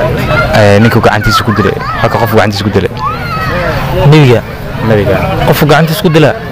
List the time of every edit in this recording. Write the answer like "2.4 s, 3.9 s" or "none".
none

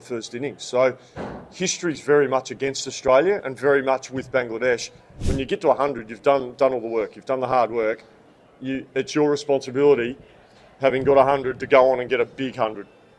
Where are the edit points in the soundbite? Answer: 5.2 s

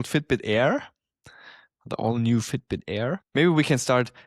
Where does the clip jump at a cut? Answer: 3.2 s

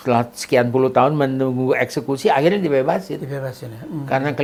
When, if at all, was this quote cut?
none

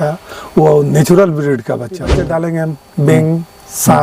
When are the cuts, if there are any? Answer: 2.1 s

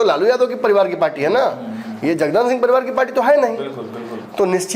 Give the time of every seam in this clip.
none

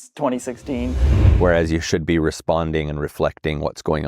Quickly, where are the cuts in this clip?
1.2 s

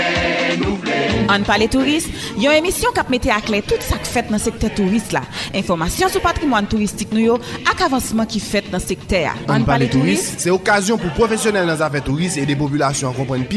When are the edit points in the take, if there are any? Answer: 1.1 s

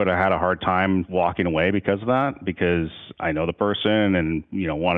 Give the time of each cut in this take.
1.1 s

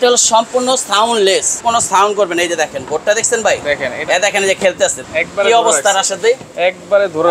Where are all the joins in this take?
1.6 s, 5.0 s

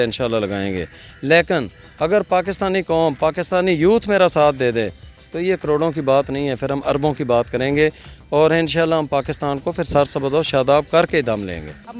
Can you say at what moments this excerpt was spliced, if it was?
none

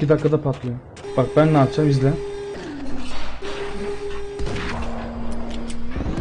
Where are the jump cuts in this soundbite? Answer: 0.9 s, 2.5 s

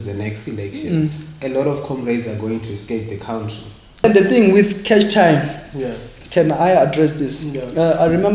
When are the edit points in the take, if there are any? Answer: 4.0 s

